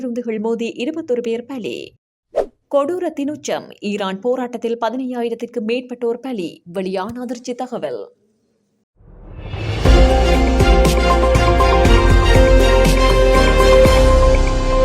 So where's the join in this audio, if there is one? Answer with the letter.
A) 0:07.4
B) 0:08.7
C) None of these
B